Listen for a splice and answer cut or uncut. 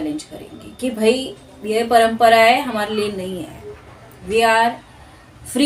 uncut